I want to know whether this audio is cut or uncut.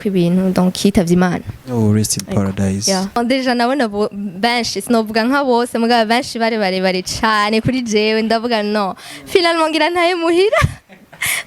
cut